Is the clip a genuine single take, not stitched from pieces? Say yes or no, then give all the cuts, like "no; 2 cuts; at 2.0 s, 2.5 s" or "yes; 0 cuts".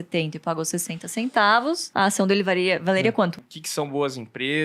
no; 2 cuts; at 1.8 s, 3.4 s